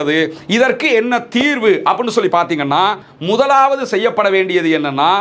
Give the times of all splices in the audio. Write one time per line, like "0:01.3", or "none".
0:03.1